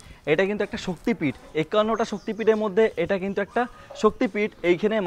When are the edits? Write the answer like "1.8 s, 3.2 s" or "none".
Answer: none